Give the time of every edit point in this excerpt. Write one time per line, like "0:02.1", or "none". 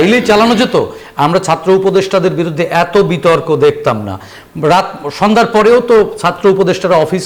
none